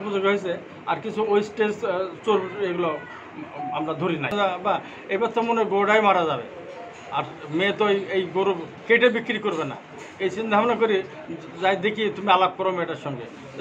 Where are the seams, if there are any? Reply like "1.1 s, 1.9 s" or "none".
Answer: 4.3 s